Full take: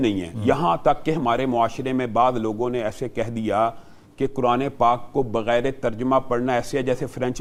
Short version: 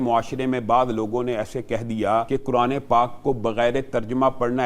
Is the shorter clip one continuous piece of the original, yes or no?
no